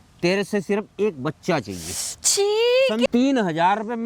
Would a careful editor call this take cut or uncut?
cut